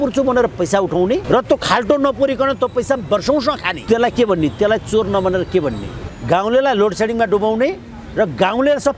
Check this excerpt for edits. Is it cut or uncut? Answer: cut